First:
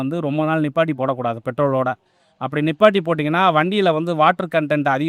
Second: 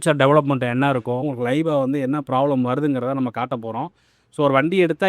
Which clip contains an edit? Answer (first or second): second